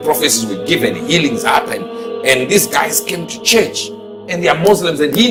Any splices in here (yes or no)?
no